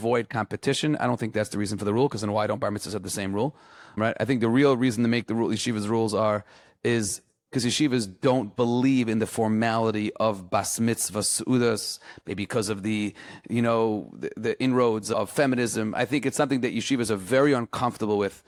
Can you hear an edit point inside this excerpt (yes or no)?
no